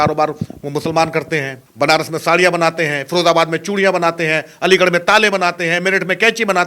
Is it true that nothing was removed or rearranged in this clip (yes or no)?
no